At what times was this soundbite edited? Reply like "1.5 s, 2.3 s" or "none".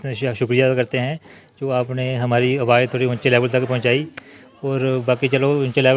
none